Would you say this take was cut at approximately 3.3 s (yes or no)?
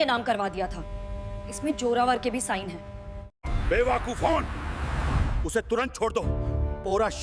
yes